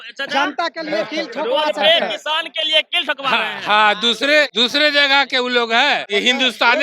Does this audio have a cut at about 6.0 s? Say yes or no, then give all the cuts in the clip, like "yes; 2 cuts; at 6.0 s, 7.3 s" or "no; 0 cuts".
yes; 2 cuts; at 4.5 s, 6.0 s